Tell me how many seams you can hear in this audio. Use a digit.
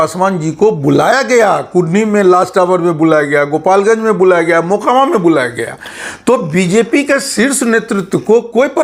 0